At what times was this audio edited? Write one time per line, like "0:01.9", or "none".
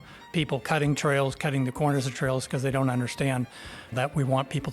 none

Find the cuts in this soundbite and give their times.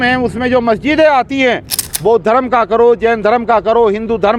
0:01.8

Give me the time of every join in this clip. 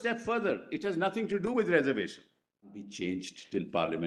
0:02.9

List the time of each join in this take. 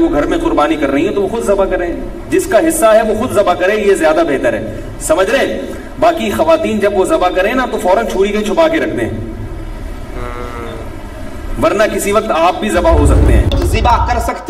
0:13.5

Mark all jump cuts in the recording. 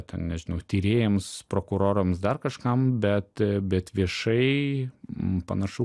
none

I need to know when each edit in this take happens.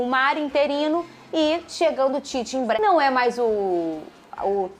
0:02.8

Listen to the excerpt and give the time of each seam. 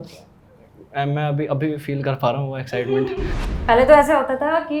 0:03.4

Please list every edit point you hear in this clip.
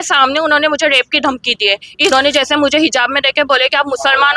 0:02.1

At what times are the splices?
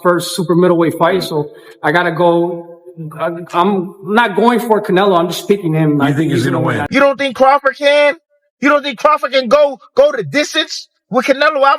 0:06.8

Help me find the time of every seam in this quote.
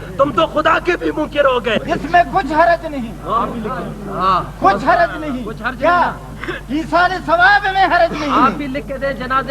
0:01.8

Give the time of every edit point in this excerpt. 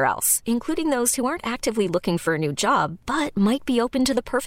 none

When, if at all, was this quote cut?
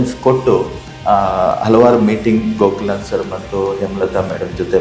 none

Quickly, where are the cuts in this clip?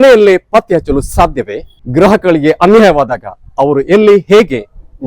0:01.8

